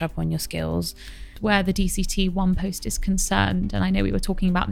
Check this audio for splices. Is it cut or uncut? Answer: cut